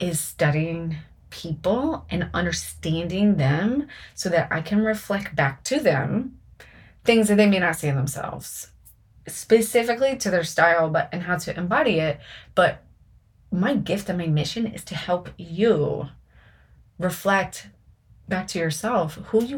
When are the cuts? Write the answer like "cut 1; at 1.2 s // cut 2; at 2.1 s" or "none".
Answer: cut 1; at 18.3 s

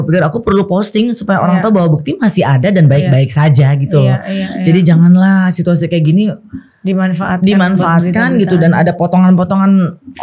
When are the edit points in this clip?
none

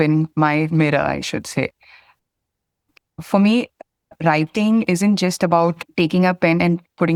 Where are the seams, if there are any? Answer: none

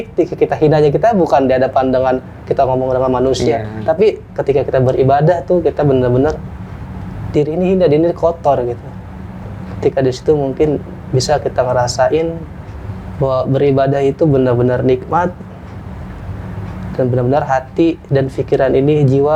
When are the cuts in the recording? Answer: none

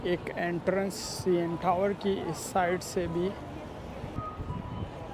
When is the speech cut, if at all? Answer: cut 1; at 4.2 s

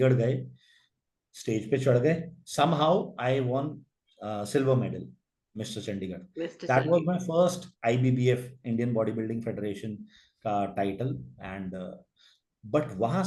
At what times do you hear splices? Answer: none

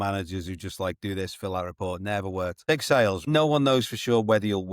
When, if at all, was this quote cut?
cut 1; at 2.6 s // cut 2; at 3.2 s

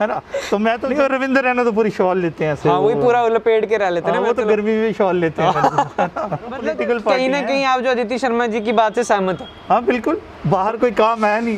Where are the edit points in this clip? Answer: cut 1; at 0.8 s // cut 2; at 6.6 s // cut 3; at 10.3 s

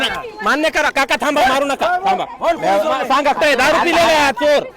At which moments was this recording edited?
cut 1; at 3.4 s

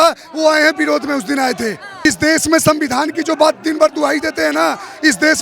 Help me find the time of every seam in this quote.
cut 1; at 2.1 s

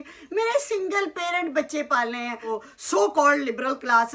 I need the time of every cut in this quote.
cut 1; at 2.6 s

